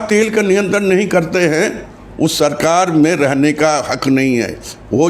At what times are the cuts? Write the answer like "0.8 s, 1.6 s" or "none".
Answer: none